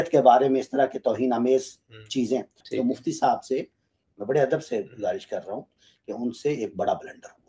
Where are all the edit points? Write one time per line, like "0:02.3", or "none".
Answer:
0:02.6

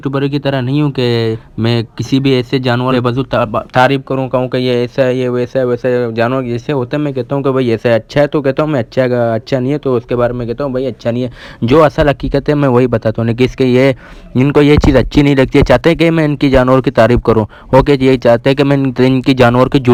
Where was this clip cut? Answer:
none

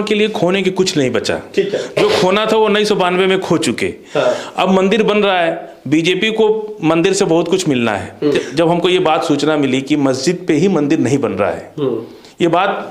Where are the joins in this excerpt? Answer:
0:08.4

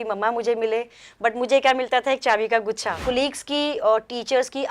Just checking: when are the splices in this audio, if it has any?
0:03.0

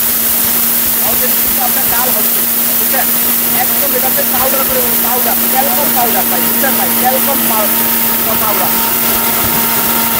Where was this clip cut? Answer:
none

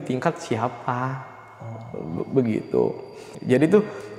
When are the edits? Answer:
0:03.3

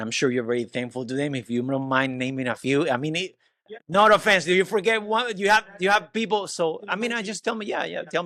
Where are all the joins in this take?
none

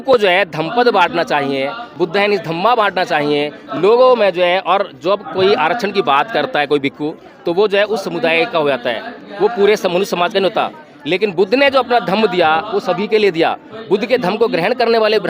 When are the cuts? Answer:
none

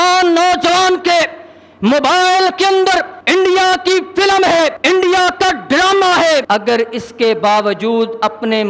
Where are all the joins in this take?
0:03.1
0:04.8
0:06.4

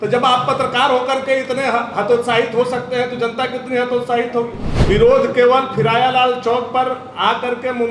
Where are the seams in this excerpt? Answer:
0:04.7

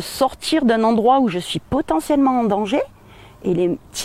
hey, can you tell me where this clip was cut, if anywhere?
none

